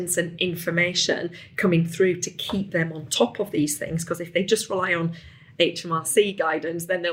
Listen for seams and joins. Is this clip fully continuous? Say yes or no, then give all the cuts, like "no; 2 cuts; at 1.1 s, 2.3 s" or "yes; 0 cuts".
no; 1 cut; at 5.5 s